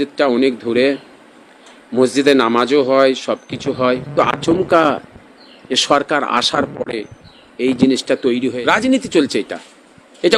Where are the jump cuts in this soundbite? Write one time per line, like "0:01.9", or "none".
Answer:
0:04.1
0:08.5